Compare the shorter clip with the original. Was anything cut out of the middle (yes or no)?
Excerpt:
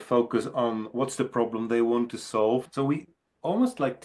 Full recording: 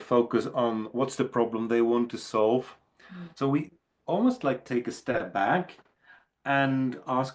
yes